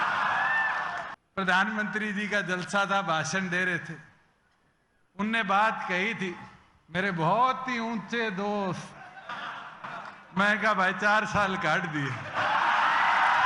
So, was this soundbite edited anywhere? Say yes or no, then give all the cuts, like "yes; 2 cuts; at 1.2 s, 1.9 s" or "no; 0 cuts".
yes; 1 cut; at 1.2 s